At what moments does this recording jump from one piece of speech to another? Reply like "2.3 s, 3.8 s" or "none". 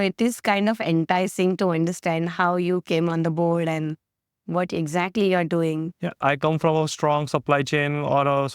6.2 s